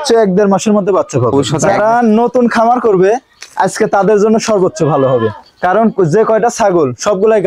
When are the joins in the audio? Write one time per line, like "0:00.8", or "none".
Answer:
0:01.3